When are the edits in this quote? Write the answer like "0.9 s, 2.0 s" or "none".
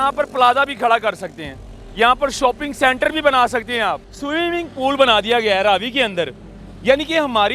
4.1 s